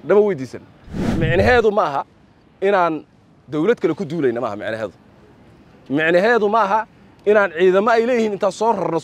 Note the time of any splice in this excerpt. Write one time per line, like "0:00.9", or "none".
0:01.2